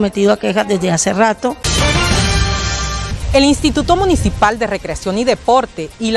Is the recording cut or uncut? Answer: cut